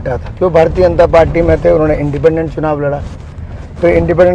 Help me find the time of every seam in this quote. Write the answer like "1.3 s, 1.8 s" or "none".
none